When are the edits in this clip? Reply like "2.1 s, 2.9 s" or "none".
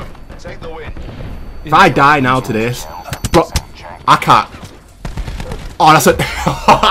none